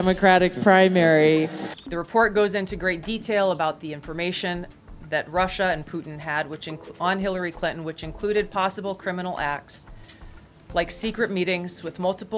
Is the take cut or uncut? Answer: cut